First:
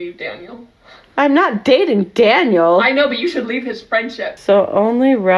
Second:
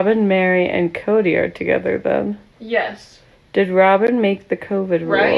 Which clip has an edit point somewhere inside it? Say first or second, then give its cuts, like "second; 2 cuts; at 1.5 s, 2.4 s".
first; 1 cut; at 4.3 s